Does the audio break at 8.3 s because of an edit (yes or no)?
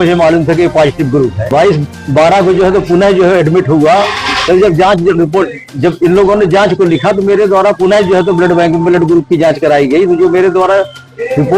no